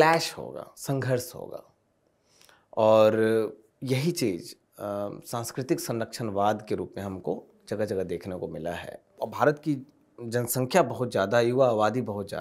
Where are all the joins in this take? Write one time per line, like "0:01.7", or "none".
0:09.2